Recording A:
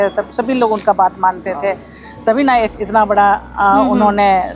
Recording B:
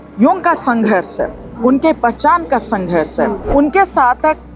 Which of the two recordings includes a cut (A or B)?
B